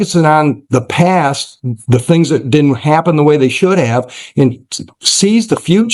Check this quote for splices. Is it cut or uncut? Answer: uncut